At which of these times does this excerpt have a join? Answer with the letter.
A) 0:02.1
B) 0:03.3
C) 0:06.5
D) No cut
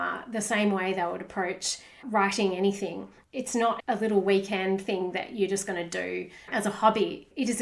B